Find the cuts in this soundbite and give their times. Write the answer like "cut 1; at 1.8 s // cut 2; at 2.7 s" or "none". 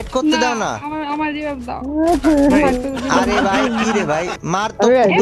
none